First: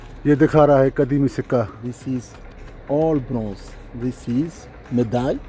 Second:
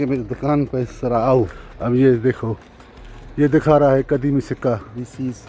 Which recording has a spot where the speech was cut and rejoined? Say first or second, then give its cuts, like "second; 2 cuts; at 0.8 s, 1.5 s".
second; 1 cut; at 1.6 s